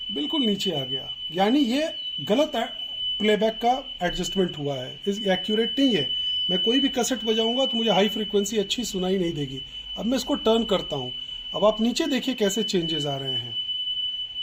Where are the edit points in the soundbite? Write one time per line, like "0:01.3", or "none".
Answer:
none